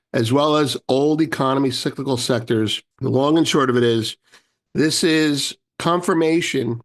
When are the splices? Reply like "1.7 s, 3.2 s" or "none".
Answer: 2.9 s